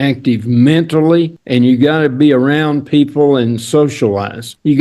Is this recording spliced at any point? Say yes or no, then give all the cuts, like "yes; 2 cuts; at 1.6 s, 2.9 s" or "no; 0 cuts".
no; 0 cuts